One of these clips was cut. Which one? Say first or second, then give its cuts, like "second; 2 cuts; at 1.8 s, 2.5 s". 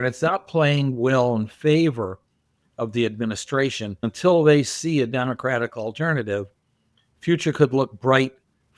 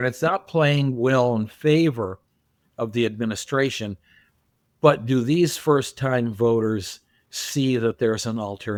first; 1 cut; at 4.1 s